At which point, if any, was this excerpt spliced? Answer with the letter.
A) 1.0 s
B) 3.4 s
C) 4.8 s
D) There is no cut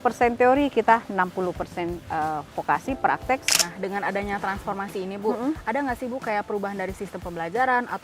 B